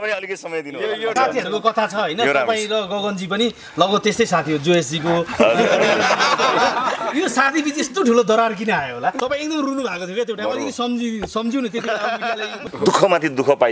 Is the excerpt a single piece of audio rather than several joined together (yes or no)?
no